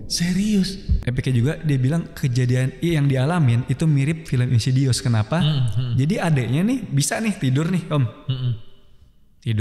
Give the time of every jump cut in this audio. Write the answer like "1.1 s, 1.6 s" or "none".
0.9 s

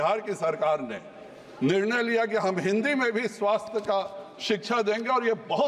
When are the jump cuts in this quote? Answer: none

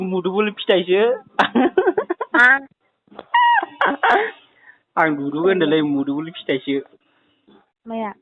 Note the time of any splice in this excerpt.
none

